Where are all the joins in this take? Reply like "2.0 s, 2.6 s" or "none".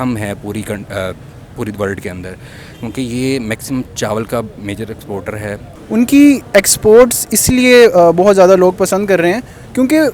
5.7 s